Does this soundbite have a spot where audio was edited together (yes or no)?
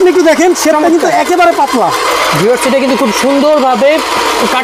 yes